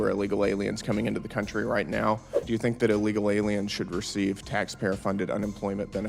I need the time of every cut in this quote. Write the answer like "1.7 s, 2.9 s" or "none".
2.4 s